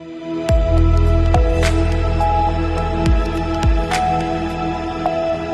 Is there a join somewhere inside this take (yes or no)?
no